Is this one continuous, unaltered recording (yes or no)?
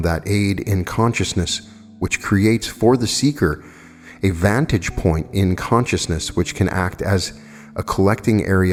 yes